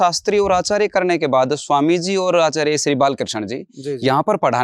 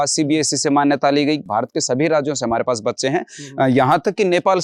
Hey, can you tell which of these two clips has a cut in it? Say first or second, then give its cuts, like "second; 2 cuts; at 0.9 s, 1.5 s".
second; 1 cut; at 1.4 s